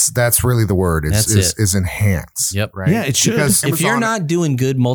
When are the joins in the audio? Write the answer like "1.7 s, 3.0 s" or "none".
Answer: 3.6 s

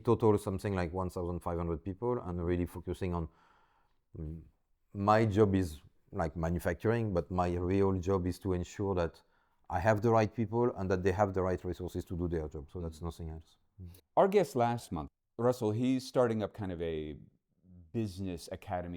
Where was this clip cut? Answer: none

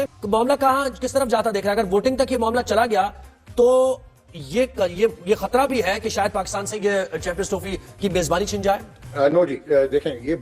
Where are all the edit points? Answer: 8.9 s

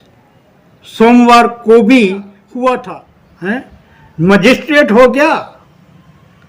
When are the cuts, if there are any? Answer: 2.8 s

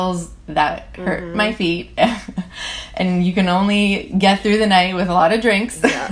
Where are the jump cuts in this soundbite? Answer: none

